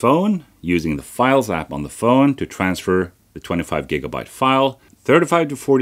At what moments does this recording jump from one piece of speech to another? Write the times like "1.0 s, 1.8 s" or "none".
4.9 s